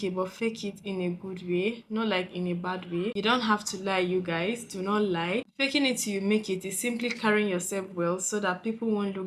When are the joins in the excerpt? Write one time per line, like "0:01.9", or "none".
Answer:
none